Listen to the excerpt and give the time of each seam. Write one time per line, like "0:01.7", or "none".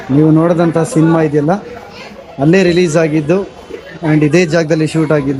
none

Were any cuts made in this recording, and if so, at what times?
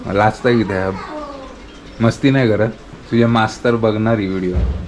0:02.9

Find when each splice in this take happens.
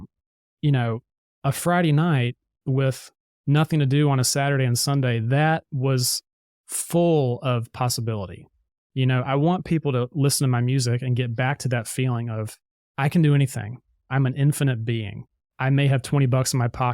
0:14.1

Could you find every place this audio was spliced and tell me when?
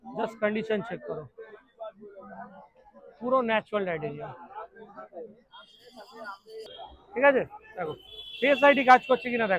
0:06.7

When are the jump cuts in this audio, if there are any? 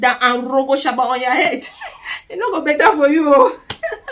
none

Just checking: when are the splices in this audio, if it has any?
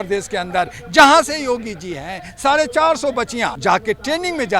0:03.6

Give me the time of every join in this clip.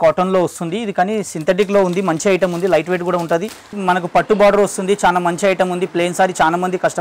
0:03.7

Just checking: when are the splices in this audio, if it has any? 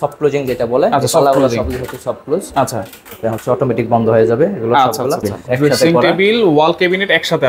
0:05.3

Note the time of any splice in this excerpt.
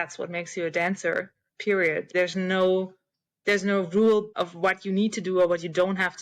0:02.1
0:04.4

